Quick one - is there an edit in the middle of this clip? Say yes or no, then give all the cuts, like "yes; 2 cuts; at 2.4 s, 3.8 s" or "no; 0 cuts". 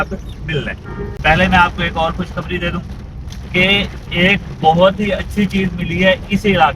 yes; 1 cut; at 1.0 s